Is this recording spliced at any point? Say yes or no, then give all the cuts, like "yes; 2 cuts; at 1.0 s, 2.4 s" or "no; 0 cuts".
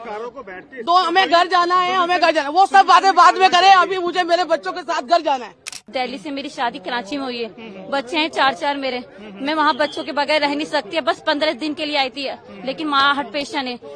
yes; 1 cut; at 5.9 s